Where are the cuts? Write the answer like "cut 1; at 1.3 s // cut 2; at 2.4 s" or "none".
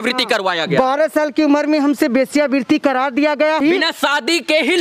cut 1; at 3.6 s

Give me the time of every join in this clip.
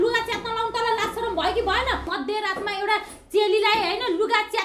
cut 1; at 2.1 s

